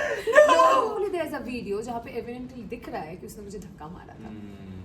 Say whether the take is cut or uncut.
cut